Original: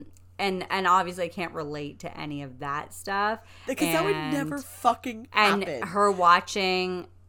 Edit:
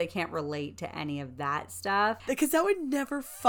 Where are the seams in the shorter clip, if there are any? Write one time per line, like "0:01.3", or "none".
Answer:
0:02.2